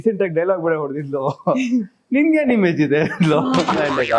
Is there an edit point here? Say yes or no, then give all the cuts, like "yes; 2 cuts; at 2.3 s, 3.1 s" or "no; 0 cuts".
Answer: no; 0 cuts